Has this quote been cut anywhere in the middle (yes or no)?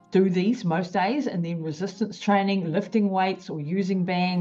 no